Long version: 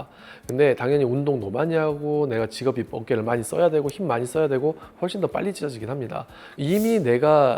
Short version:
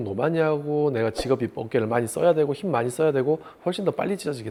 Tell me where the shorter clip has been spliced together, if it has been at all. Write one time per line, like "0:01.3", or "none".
none